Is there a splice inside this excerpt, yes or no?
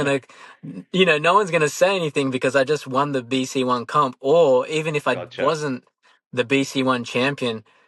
no